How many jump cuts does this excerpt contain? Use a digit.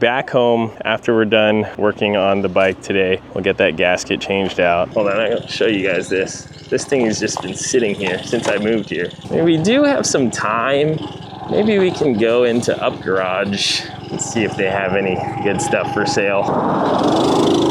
3